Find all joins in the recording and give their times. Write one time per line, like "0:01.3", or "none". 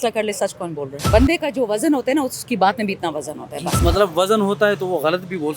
0:00.9
0:03.8